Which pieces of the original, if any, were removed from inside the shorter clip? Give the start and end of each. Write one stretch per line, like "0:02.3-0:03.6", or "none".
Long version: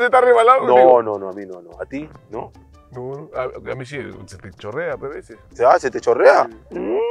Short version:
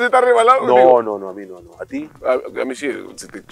0:02.2-0:03.3

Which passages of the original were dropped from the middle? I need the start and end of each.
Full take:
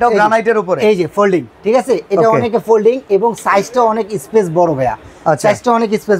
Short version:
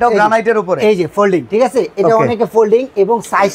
0:01.5-0:01.6

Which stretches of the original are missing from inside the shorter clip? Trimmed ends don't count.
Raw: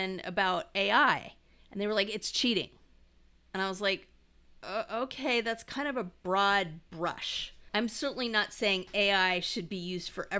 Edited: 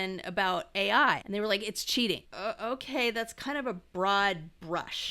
0:01.2-0:01.7
0:02.8-0:04.6

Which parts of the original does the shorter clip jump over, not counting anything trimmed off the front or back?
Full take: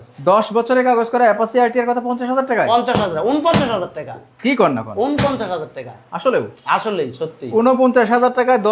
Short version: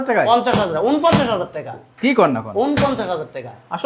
none

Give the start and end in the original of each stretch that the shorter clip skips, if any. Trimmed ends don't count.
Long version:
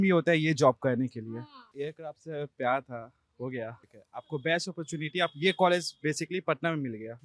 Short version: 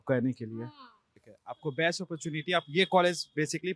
0:01.8-0:03.7

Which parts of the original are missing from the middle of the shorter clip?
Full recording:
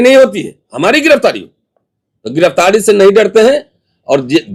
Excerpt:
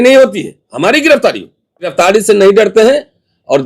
0:01.9-0:02.5

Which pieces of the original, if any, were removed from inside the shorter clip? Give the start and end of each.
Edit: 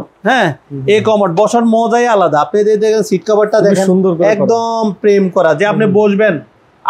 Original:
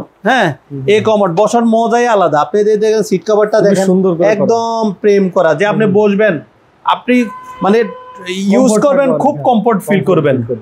none

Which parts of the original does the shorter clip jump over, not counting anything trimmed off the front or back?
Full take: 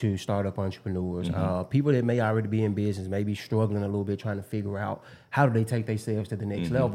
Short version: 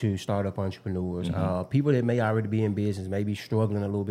none

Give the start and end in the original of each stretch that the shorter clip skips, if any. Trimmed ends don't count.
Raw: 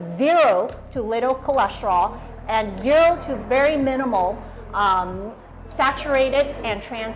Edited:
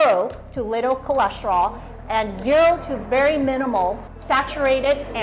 0:04.5-0:05.6

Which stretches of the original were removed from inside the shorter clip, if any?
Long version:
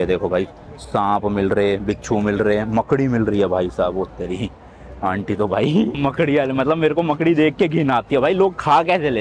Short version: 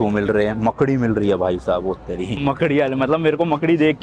0:04.5-0:06.0

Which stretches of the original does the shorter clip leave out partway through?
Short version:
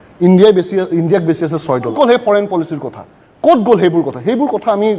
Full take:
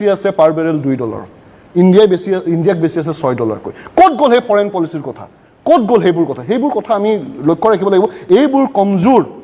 0:03.5-0:04.2

